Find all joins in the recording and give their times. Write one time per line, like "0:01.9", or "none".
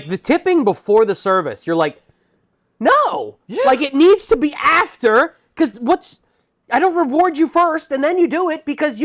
none